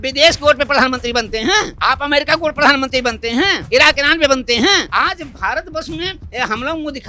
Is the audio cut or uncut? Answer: cut